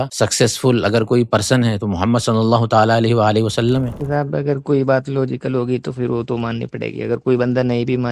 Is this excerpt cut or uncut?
cut